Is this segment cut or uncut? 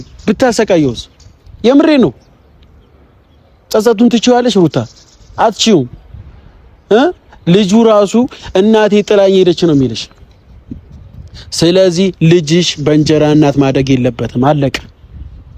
uncut